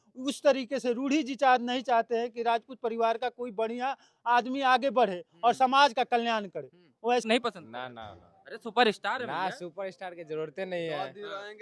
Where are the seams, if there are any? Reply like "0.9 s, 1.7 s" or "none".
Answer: 7.2 s